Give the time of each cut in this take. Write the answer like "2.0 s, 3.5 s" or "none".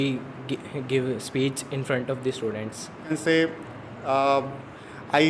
3.1 s